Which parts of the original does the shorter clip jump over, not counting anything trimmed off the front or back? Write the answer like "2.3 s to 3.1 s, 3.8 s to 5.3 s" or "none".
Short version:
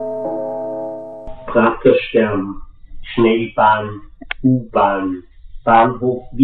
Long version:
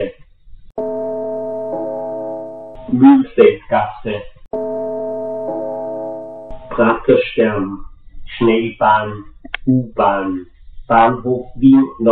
2.6 s to 6.4 s